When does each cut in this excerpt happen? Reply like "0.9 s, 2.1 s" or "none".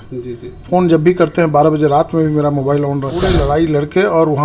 3.1 s